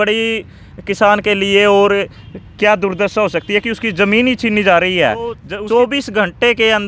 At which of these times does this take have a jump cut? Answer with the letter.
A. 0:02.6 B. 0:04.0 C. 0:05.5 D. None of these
C